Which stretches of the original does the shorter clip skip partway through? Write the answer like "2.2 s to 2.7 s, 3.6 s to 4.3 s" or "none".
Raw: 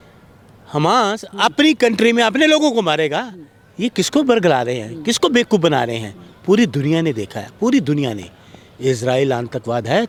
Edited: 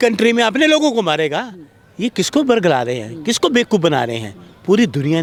none